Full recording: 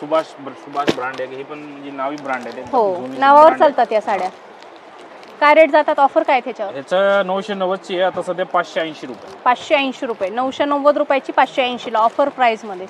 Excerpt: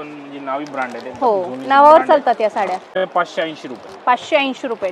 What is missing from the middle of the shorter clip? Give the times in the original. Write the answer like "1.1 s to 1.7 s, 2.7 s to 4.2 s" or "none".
4.5 s to 8.3 s